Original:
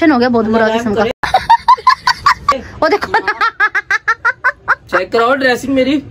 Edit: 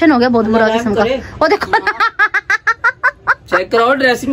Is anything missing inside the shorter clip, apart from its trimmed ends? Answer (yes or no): yes